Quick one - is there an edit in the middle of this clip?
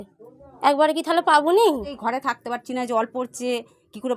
yes; 1 cut; at 2.0 s

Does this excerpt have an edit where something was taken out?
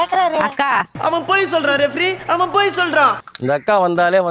yes; 1 cut; at 3.3 s

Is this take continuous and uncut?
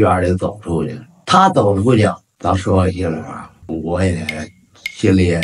yes; 0 cuts

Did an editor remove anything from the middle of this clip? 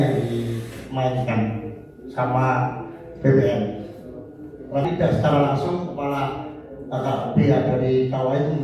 yes; 1 cut; at 4.8 s

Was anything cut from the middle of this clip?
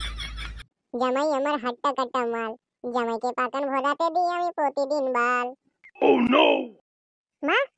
no; 0 cuts

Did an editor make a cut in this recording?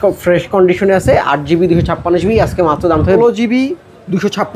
yes; 1 cut; at 3.2 s

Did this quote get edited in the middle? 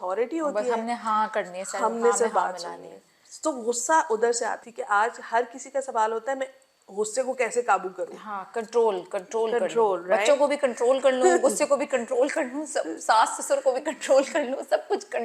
yes; 1 cut; at 4.6 s

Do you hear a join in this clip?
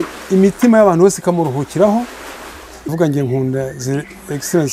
yes; 1 cut; at 2.9 s

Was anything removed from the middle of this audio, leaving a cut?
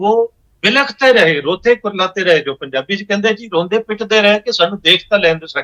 no; 0 cuts

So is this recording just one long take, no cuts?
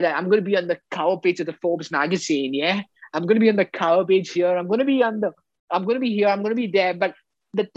yes; 0 cuts

